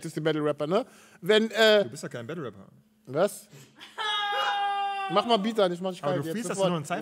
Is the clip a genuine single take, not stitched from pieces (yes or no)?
yes